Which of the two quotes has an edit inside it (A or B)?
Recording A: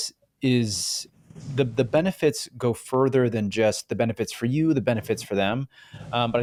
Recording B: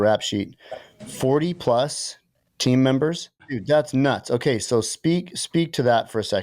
B